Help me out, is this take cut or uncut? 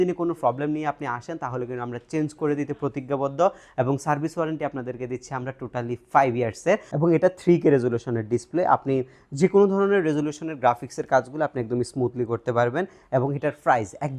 cut